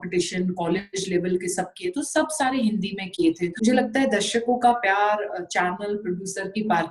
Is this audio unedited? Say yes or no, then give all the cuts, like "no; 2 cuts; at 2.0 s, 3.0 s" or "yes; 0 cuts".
no; 1 cut; at 3.5 s